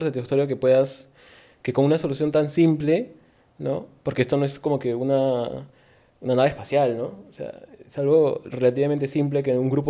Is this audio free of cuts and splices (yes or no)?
yes